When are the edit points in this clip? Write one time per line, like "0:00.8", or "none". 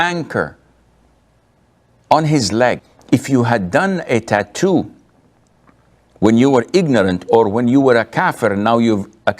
0:02.9